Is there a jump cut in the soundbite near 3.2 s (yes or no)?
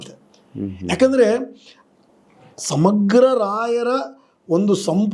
no